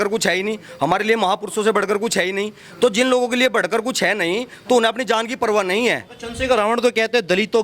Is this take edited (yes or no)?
no